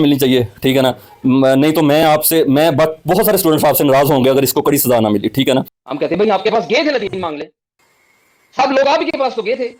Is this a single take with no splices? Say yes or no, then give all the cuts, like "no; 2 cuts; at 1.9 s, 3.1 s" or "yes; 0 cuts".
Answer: no; 1 cut; at 5.8 s